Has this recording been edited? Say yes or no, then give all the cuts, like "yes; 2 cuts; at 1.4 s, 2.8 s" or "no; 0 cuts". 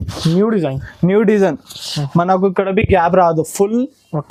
no; 0 cuts